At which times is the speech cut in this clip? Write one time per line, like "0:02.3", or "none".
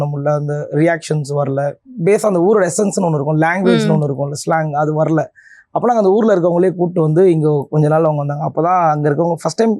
none